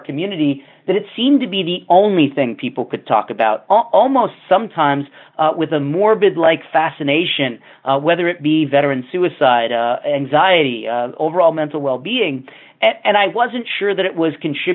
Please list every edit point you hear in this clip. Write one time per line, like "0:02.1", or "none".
none